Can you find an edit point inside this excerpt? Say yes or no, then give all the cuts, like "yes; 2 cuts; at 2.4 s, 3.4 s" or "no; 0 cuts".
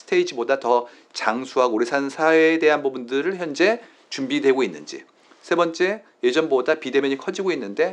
no; 0 cuts